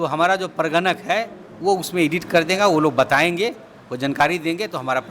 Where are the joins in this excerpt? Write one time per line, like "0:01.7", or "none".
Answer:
none